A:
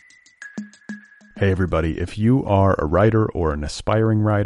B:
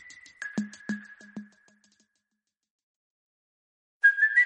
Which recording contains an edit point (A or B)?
A